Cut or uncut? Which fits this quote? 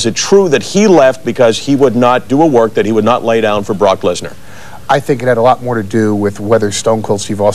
uncut